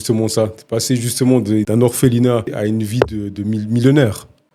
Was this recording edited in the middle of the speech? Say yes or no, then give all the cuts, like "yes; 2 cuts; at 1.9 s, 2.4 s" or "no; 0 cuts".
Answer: yes; 2 cuts; at 1.7 s, 2.5 s